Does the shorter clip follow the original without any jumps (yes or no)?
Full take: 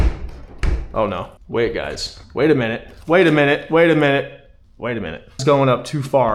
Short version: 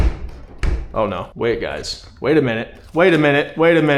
no